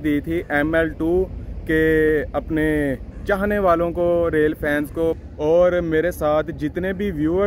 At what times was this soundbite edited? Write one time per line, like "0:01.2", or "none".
0:05.2